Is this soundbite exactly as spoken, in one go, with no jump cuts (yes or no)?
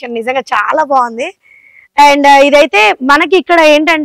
yes